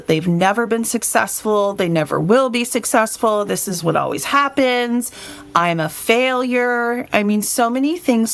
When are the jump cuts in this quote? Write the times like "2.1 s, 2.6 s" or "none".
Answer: none

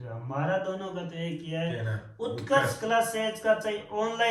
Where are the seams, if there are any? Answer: none

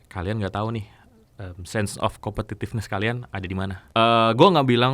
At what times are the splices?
3.8 s

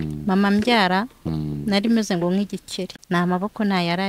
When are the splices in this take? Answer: 3.0 s

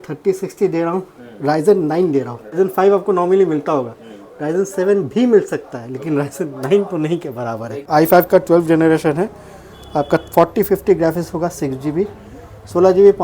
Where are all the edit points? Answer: 2.5 s, 7.7 s

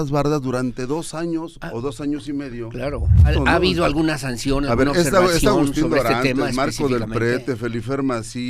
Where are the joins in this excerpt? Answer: 3.3 s

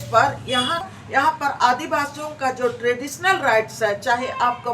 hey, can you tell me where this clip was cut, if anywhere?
1.2 s

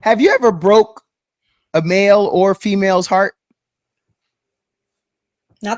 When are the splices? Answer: none

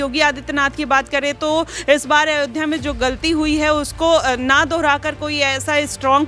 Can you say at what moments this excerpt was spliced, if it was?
none

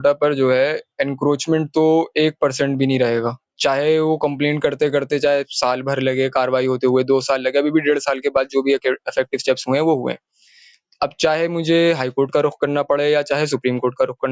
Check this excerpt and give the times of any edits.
none

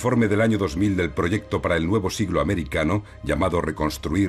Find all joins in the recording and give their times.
1.5 s

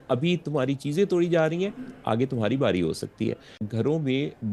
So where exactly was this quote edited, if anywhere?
3.6 s

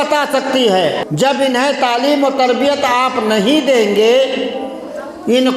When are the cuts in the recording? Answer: 1.0 s

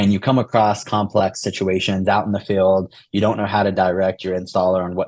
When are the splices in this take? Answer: none

